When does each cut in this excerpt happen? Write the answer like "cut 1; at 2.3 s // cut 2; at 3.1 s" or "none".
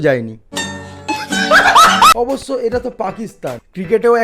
cut 1; at 2.1 s